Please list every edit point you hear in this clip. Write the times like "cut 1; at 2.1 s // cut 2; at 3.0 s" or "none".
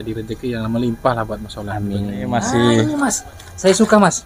cut 1; at 2.3 s

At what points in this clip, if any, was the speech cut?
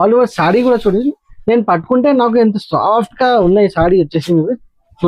none

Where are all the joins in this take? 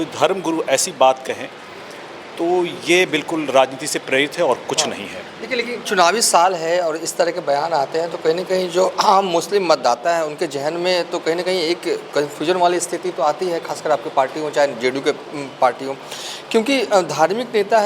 none

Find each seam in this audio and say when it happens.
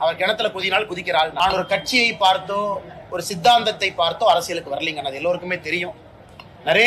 cut 1; at 1.3 s

